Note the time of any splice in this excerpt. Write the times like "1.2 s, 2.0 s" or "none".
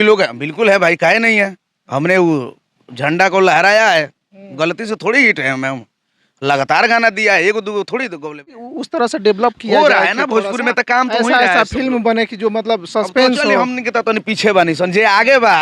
8.6 s